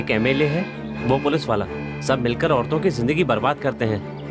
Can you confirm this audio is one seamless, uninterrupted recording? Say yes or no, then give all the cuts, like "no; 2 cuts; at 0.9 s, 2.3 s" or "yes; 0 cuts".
yes; 0 cuts